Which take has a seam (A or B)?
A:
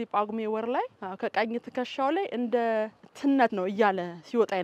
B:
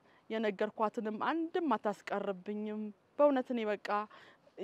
A